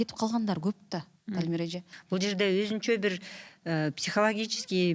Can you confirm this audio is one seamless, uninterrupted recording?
no; 1 cut; at 1.9 s

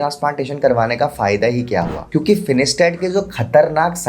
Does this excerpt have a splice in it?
yes; 1 cut; at 2.0 s

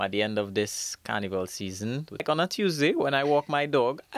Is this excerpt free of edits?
no; 1 cut; at 2.2 s

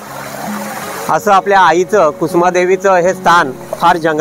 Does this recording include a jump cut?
no; 0 cuts

